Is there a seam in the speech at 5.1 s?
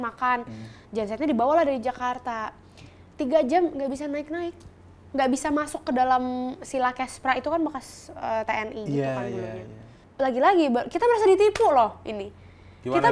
no; 1 cut; at 10.0 s

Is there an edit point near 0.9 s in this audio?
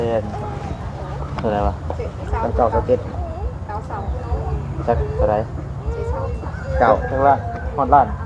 no; 0 cuts

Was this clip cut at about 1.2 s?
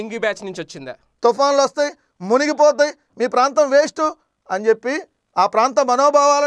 yes; 1 cut; at 1.2 s

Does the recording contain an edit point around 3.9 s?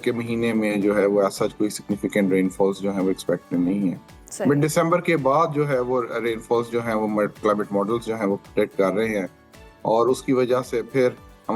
no; 0 cuts

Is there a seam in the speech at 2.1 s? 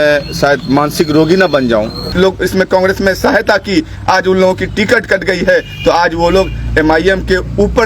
yes; 1 cut; at 2.1 s

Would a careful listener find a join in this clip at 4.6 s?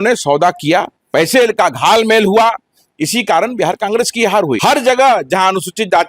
yes; 2 cuts; at 1.0 s, 4.6 s

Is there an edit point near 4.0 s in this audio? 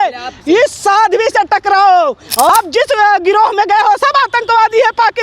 no; 1 cut; at 2.5 s

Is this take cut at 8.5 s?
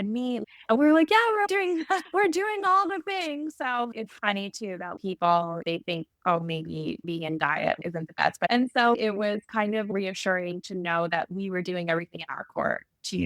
yes; 1 cut; at 8.5 s

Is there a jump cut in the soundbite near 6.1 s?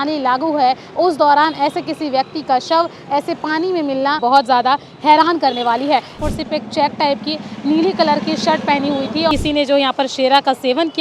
yes; 3 cuts; at 4.2 s, 6.1 s, 9.3 s

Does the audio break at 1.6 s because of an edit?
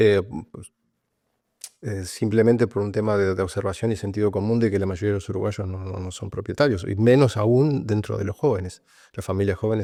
no; 0 cuts

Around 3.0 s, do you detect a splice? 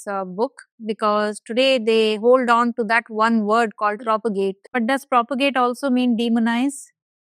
no; 1 cut; at 4.6 s

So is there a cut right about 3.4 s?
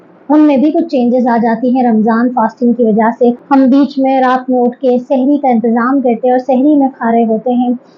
yes; 1 cut; at 3.4 s

